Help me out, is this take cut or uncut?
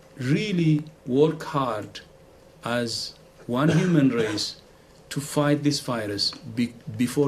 uncut